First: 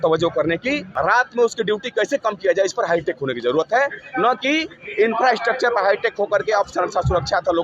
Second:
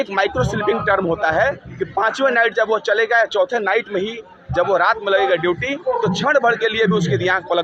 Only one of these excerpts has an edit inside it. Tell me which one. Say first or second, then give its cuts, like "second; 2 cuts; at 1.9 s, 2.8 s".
first; 1 cut; at 0.9 s